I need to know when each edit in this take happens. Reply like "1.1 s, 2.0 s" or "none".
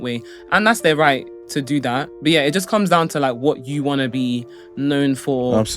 2.1 s